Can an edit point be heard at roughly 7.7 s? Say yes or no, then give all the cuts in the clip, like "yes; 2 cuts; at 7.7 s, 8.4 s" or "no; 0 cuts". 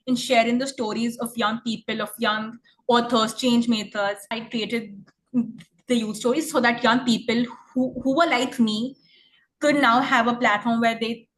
no; 1 cut; at 4.3 s